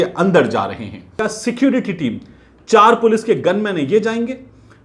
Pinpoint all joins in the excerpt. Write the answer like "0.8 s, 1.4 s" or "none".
1.2 s